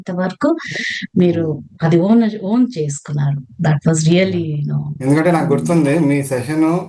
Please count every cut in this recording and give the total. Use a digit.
0